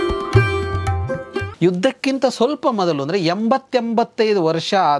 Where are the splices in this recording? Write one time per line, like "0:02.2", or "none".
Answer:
0:01.5